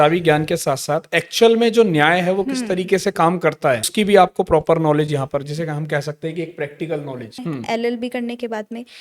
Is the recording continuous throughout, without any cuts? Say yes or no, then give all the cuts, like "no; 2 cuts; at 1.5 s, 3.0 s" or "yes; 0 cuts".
no; 2 cuts; at 3.8 s, 7.4 s